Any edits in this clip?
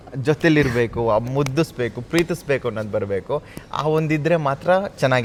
no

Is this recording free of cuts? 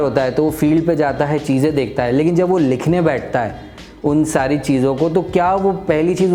yes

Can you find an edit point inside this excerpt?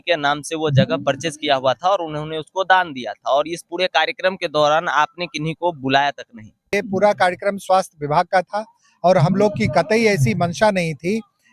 yes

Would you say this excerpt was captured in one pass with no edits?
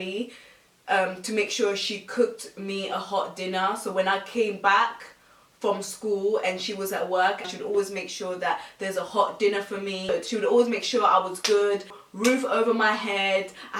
yes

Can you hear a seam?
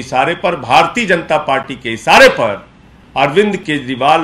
no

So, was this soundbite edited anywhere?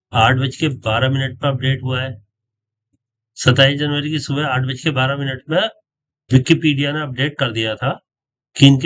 no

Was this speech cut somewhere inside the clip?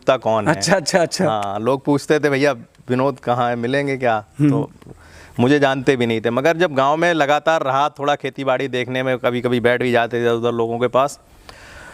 no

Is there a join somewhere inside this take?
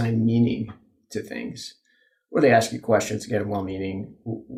no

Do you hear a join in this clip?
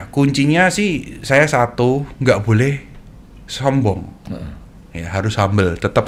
no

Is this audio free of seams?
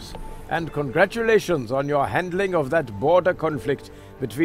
yes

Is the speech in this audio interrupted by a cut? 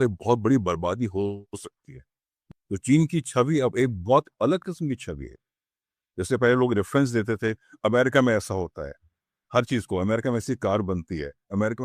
yes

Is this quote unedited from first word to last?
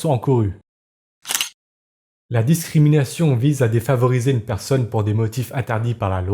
no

